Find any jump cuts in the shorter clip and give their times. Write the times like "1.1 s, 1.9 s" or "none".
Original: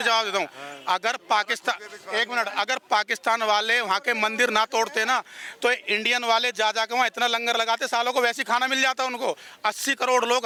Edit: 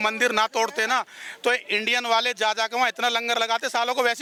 none